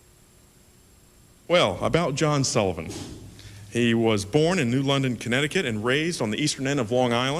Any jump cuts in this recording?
no; 0 cuts

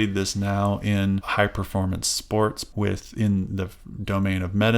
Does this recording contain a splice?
yes; 2 cuts; at 1.3 s, 2.6 s

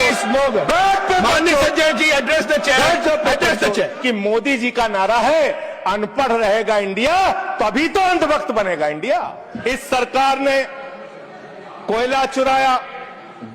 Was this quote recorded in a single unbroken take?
no; 2 cuts; at 4.0 s, 9.5 s

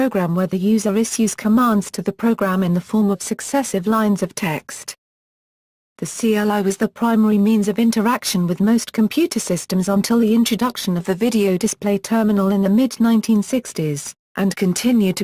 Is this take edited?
no; 0 cuts

